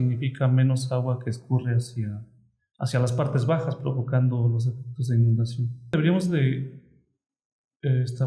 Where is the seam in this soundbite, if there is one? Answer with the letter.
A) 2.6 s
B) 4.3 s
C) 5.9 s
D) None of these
C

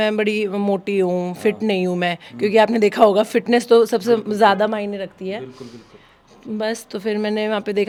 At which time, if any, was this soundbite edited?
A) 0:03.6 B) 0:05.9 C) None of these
C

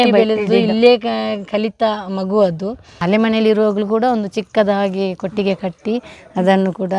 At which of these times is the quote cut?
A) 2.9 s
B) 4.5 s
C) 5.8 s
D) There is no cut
A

